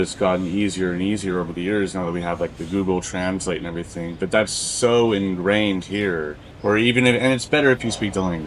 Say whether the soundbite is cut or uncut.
uncut